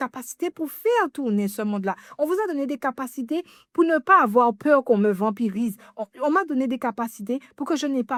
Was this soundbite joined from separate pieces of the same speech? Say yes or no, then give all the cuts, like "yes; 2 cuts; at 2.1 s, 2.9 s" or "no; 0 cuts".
no; 0 cuts